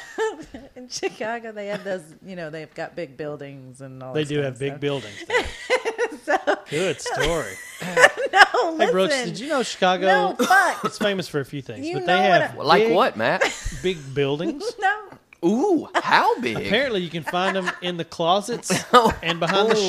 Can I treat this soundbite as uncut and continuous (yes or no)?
yes